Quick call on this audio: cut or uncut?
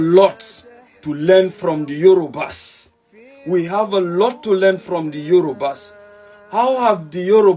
uncut